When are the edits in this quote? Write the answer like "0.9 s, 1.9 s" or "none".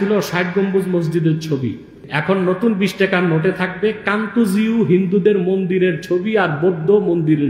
2.1 s